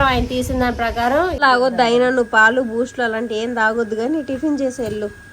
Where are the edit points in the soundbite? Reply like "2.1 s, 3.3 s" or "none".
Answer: 1.4 s

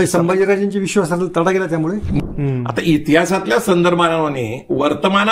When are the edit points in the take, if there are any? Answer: 2.2 s

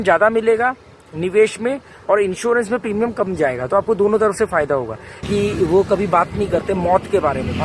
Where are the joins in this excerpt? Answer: 5.2 s

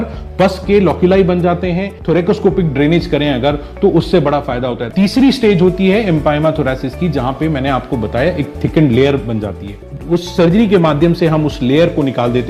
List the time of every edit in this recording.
1.9 s, 4.8 s, 9.9 s

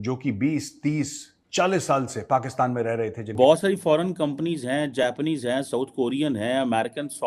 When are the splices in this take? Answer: 3.3 s

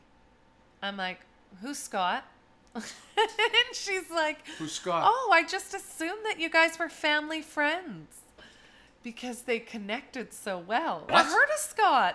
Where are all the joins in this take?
11.1 s

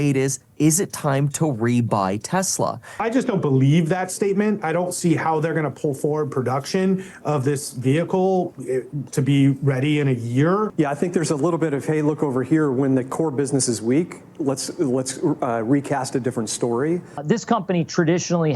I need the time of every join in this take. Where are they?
3.0 s, 10.7 s, 17.2 s

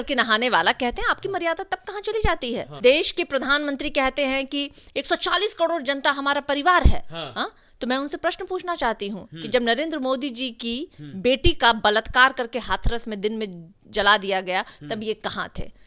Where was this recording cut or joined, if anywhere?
2.7 s

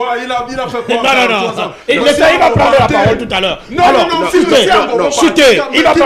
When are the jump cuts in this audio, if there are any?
none

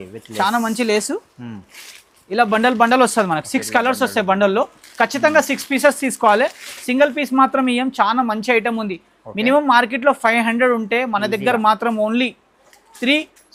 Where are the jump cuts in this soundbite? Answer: none

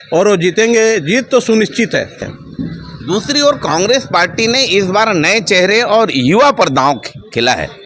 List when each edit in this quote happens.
2.2 s

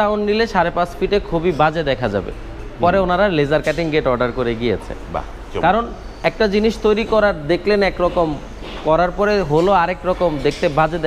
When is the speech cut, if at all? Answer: none

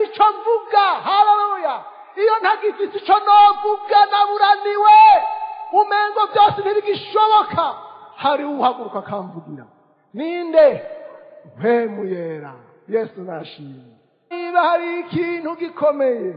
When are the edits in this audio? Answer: 14.3 s

